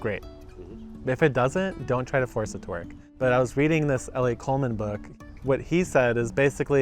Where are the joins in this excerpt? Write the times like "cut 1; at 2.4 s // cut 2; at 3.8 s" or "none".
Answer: cut 1; at 3.0 s // cut 2; at 5.0 s